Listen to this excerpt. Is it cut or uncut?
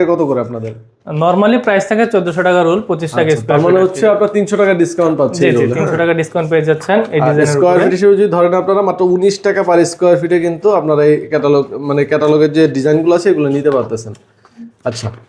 uncut